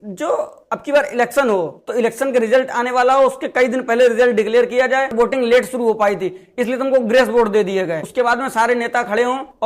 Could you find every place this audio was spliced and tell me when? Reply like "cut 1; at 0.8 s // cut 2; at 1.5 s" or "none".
cut 1; at 5.1 s // cut 2; at 8.0 s